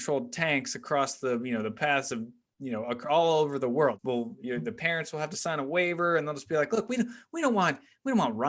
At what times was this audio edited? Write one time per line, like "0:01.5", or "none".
0:04.0